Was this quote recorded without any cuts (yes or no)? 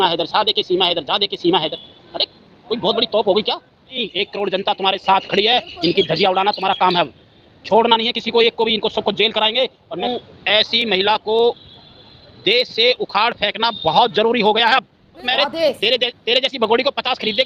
no